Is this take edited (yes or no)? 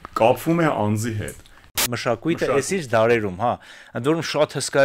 yes